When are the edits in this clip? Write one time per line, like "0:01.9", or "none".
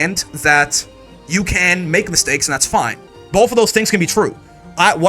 0:03.1